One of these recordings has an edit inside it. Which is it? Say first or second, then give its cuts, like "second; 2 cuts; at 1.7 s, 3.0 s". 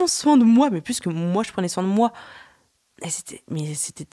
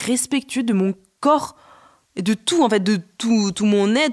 second; 1 cut; at 1.1 s